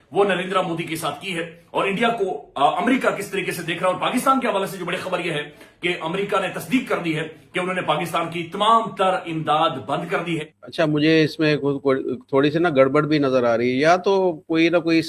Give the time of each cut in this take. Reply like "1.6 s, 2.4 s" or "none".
10.6 s